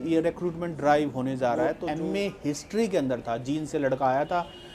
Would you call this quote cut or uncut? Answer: cut